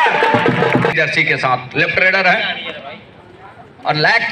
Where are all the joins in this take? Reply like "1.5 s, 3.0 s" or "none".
0.9 s